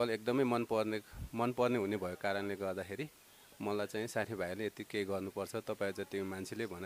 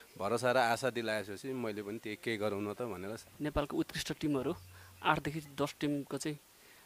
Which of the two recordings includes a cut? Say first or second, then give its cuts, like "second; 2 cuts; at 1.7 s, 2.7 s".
second; 1 cut; at 3.2 s